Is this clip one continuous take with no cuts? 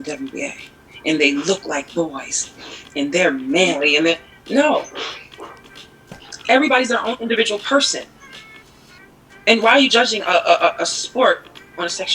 no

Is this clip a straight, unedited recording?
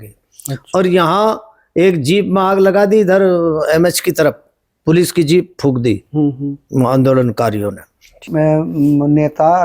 no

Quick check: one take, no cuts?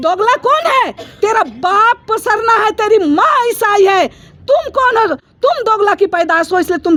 yes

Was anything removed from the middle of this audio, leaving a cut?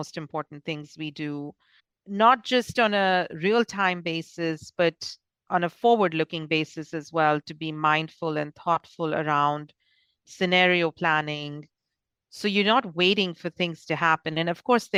no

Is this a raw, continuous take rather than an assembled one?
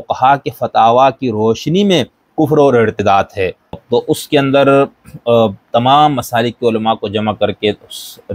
no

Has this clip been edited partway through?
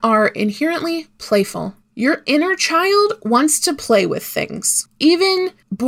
no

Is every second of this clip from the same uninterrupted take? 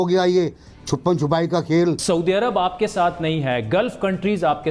no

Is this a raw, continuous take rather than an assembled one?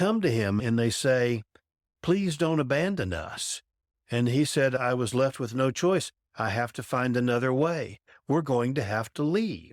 yes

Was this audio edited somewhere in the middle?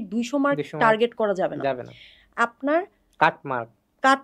no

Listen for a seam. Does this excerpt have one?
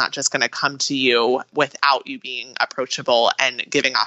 yes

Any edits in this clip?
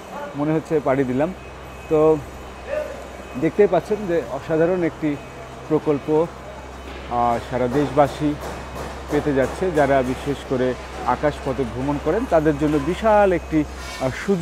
no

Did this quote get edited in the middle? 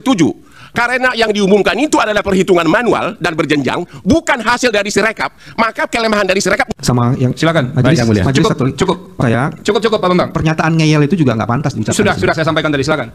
yes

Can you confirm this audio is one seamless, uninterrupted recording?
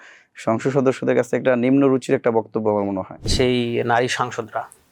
no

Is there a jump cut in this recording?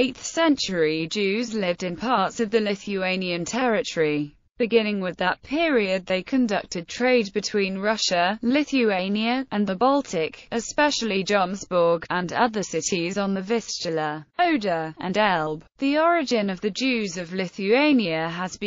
yes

